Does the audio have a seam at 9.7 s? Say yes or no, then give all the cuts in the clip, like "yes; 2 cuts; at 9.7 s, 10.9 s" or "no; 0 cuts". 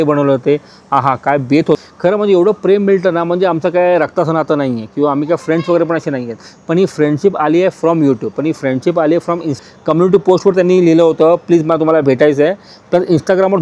yes; 2 cuts; at 1.8 s, 9.7 s